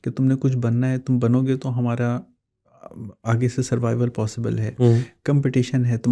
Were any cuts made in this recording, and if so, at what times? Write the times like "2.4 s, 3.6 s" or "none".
none